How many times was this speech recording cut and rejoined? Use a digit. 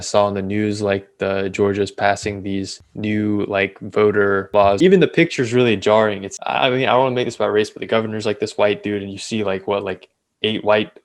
3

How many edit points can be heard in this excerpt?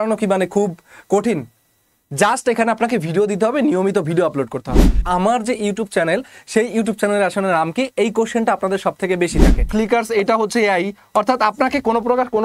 2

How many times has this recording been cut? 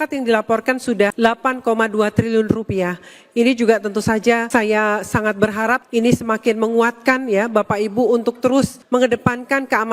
4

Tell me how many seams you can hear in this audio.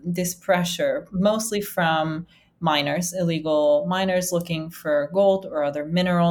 0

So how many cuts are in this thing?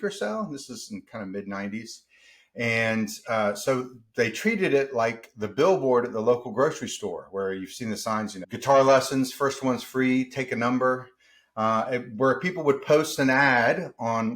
1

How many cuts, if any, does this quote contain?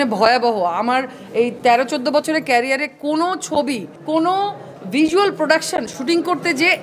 1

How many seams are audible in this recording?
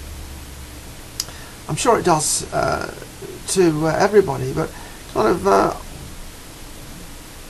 1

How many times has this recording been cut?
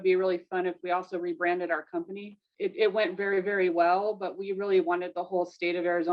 1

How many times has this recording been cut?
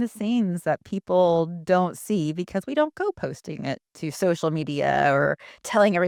0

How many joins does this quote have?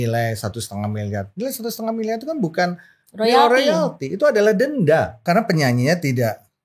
1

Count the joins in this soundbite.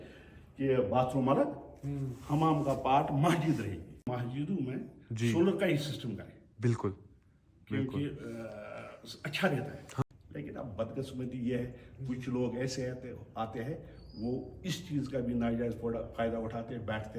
2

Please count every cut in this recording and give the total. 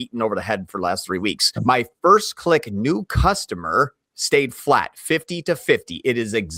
1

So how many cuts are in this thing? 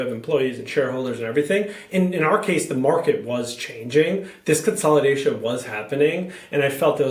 0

